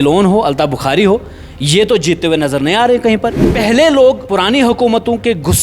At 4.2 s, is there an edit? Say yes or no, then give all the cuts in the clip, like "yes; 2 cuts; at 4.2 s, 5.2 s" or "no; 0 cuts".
yes; 2 cuts; at 3.4 s, 4.2 s